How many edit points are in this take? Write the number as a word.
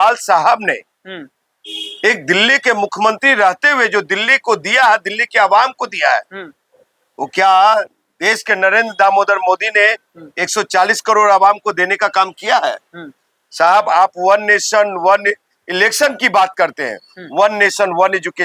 zero